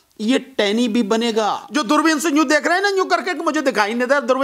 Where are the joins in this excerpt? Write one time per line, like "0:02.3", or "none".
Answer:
0:01.6